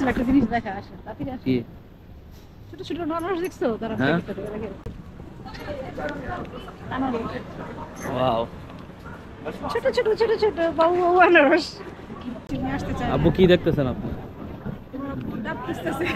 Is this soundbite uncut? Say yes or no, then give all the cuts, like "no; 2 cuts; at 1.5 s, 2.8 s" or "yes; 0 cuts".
no; 2 cuts; at 4.8 s, 12.5 s